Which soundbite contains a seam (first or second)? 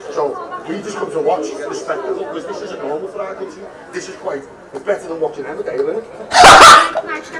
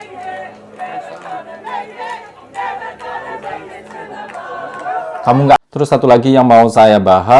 second